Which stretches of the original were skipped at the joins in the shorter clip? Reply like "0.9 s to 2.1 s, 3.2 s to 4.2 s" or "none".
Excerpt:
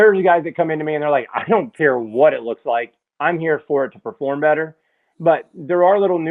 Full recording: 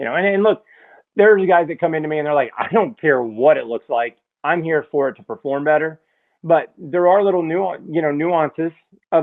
none